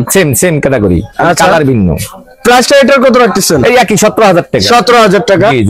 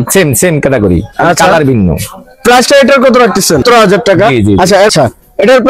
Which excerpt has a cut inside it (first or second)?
second